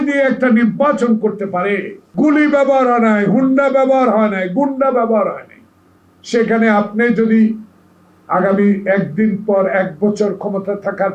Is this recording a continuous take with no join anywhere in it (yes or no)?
no